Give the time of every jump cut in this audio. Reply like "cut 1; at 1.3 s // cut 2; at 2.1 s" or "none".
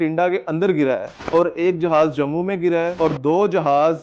cut 1; at 1.1 s // cut 2; at 2.9 s